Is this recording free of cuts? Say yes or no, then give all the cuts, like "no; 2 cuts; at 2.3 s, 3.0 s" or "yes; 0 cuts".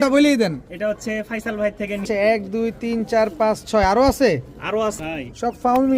no; 2 cuts; at 2.0 s, 5.0 s